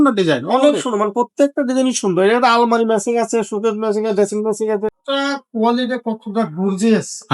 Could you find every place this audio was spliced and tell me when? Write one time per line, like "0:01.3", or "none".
0:05.0

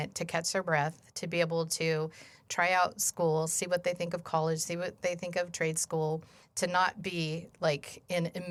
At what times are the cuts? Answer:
none

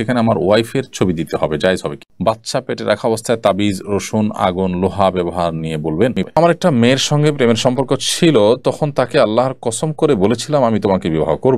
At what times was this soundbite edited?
0:02.1
0:06.3

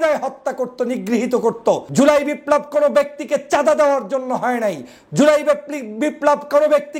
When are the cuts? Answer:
0:01.9

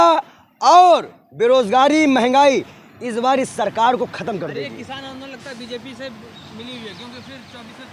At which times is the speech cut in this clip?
none

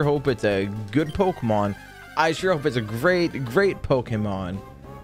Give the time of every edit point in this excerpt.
none

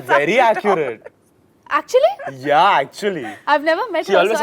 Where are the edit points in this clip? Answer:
none

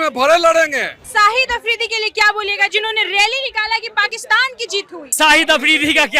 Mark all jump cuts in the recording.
0:01.0
0:05.1

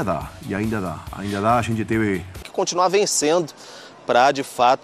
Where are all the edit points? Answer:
0:02.5

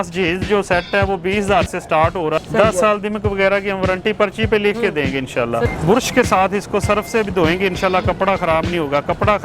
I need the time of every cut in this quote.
0:02.4
0:05.7

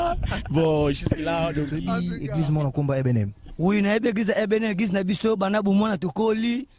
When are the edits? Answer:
0:01.7

